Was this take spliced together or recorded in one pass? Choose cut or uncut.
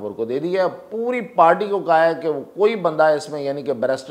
uncut